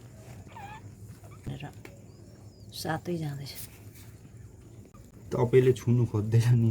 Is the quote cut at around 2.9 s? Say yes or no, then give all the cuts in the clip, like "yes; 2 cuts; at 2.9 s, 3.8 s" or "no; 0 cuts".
no; 1 cut; at 1.5 s